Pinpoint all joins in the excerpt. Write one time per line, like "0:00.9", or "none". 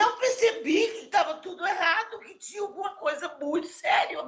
none